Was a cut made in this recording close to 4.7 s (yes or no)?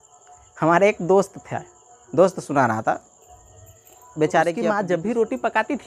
yes